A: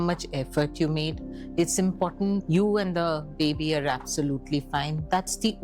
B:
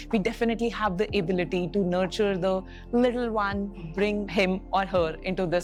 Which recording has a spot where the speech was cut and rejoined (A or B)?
A